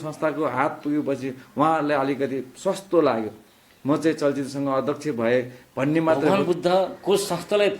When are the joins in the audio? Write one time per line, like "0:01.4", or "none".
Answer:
0:06.3